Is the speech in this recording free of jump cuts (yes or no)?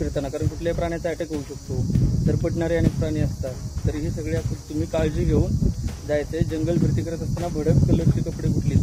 yes